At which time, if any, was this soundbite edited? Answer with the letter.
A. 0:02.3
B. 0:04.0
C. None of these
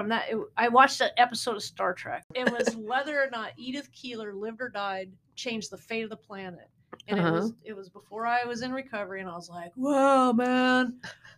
A